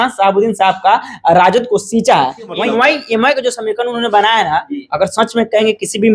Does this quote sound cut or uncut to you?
cut